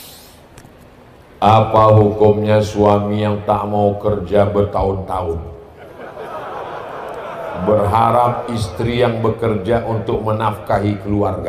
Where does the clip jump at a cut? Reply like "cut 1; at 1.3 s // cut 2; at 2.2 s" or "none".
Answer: none